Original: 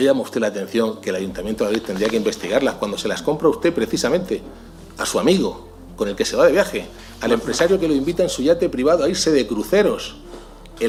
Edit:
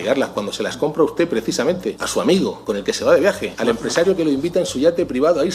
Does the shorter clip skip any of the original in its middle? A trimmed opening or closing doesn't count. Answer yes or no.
yes